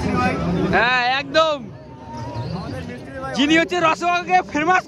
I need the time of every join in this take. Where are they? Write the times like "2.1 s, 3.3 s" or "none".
none